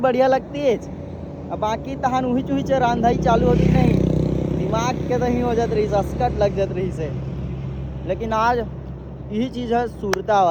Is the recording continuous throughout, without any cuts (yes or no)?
yes